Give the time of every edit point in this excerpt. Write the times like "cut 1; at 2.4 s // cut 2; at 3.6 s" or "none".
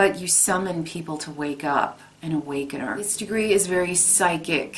cut 1; at 3.2 s